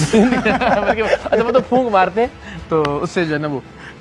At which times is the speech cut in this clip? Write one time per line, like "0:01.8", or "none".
none